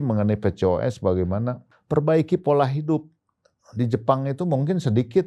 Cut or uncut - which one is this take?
cut